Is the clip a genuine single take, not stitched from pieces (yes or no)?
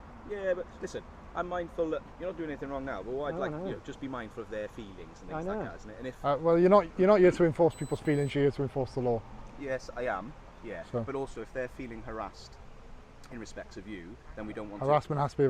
yes